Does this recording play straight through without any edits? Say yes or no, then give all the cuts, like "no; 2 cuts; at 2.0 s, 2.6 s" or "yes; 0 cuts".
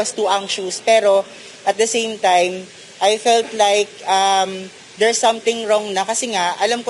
yes; 0 cuts